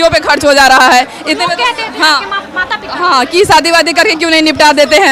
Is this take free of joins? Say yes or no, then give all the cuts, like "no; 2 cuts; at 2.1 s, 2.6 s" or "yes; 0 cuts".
yes; 0 cuts